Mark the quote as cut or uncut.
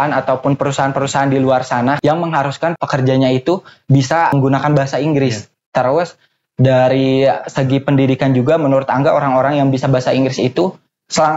cut